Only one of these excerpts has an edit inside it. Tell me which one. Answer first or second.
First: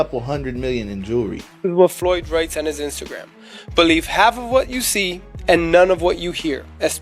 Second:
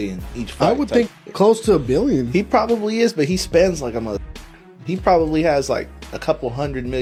first